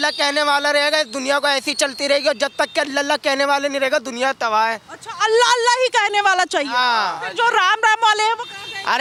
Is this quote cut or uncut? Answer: uncut